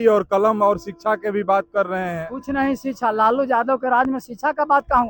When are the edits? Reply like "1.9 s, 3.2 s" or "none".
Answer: none

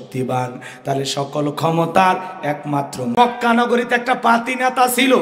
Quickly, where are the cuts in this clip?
3.1 s

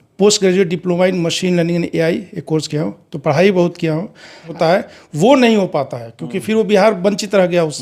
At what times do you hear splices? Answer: 4.5 s

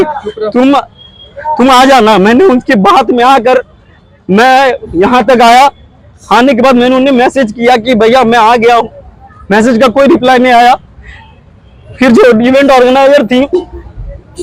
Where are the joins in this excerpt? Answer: none

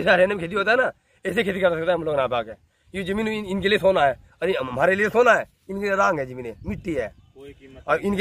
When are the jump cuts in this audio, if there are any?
none

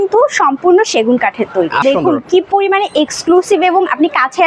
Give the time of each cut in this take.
1.8 s

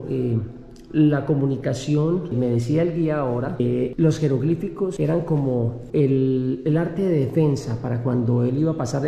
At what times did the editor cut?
none

